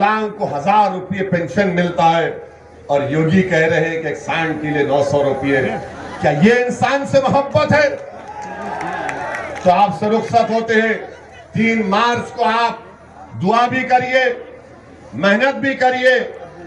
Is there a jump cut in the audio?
no; 0 cuts

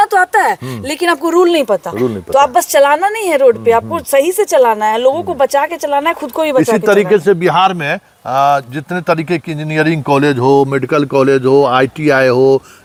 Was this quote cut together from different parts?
no; 0 cuts

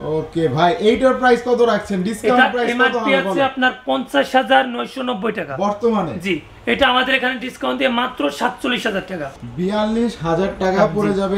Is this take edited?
yes; 1 cut; at 9.2 s

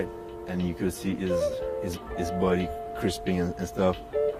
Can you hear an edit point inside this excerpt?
no; 0 cuts

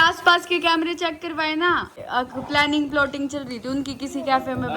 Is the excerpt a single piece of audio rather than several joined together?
no; 1 cut; at 2.0 s

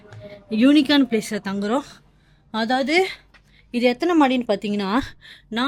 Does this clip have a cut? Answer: no; 0 cuts

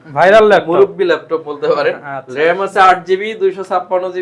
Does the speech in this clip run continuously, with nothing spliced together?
yes; 0 cuts

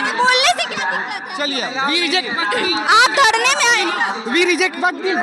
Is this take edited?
no; 0 cuts

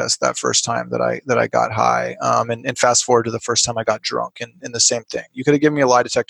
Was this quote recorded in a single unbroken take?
yes; 0 cuts

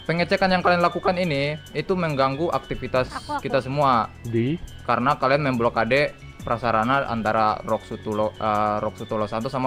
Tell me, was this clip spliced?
no; 0 cuts

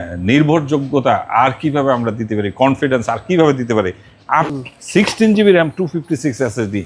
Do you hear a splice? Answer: yes; 1 cut; at 4.5 s

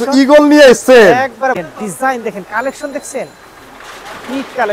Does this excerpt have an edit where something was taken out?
yes; 1 cut; at 1.6 s

